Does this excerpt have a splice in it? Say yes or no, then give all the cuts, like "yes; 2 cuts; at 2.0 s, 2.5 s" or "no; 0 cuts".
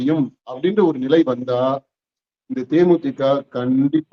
no; 0 cuts